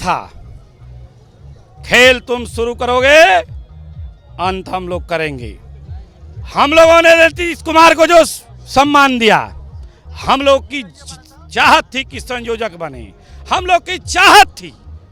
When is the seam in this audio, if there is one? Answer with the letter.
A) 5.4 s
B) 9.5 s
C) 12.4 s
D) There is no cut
D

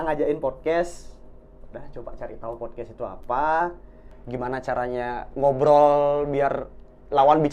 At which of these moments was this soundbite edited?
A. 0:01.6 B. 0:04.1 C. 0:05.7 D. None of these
B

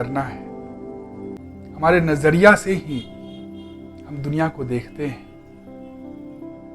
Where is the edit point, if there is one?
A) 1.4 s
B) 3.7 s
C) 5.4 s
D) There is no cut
A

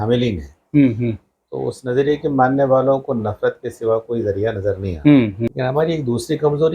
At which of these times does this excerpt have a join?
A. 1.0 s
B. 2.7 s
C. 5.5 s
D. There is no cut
C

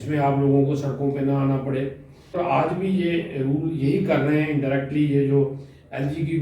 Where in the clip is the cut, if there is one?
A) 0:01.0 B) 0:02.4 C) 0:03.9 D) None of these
B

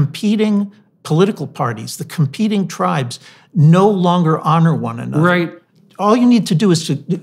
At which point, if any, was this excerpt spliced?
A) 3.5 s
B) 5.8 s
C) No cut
B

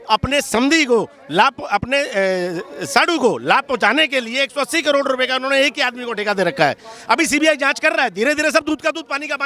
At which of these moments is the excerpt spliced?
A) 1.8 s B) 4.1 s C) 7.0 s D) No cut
D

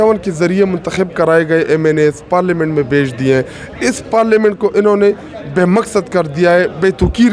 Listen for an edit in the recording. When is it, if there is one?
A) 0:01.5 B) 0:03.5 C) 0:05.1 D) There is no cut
D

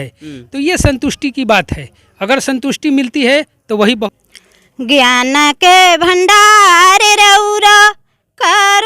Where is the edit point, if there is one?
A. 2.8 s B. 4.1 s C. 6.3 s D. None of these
B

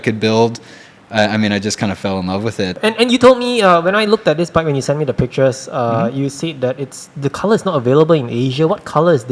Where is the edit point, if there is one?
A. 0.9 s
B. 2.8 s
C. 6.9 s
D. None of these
B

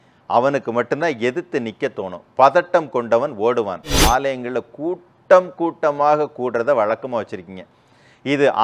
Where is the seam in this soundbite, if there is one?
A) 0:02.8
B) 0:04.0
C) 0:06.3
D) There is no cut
B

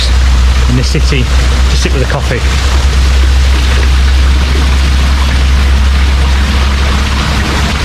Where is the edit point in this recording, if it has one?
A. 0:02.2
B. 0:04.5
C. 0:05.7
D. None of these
D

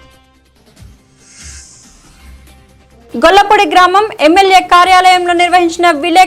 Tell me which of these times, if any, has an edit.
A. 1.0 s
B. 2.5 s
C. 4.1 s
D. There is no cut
A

